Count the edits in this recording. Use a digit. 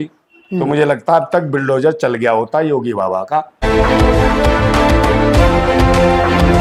0